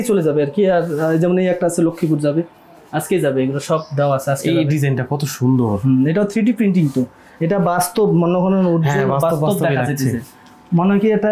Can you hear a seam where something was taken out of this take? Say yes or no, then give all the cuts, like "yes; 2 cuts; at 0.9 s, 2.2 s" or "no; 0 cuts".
no; 0 cuts